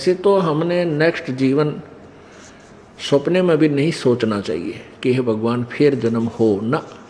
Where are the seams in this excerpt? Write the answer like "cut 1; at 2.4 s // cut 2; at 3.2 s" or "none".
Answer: none